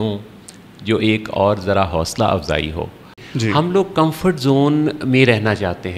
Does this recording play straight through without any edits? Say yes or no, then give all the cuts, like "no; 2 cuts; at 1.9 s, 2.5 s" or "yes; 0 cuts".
no; 1 cut; at 3.2 s